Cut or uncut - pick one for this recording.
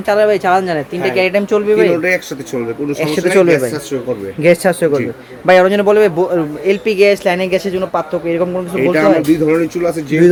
uncut